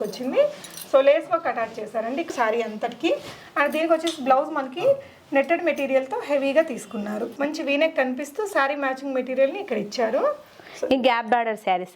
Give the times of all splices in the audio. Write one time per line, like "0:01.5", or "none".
0:02.3
0:07.3